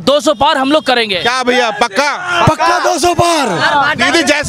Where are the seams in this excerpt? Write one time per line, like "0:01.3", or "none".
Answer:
none